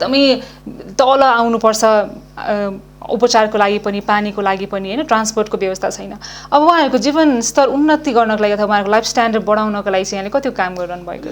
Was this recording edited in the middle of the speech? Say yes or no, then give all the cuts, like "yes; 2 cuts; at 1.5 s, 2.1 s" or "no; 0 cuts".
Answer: no; 0 cuts